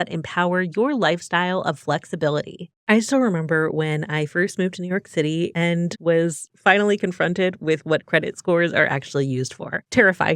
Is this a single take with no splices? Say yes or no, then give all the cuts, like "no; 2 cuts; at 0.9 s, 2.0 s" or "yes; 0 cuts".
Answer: yes; 0 cuts